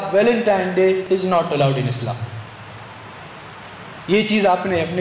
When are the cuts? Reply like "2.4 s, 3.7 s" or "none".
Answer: 1.0 s